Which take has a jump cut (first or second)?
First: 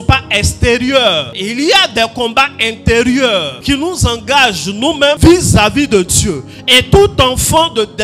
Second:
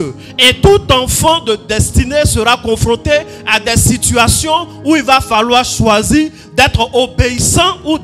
first